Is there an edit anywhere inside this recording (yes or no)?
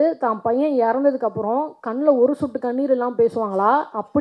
no